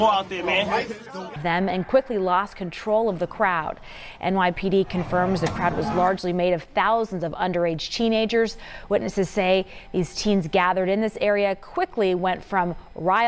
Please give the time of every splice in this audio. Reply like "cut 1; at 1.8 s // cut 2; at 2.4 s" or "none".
cut 1; at 1.4 s